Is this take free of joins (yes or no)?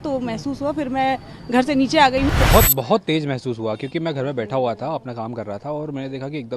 no